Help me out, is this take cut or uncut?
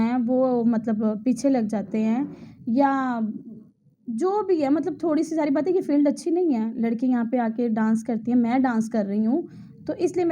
uncut